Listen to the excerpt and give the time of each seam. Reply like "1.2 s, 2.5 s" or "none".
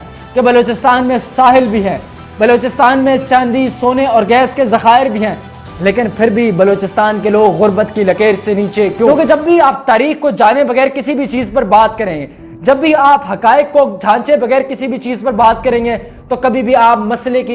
9.1 s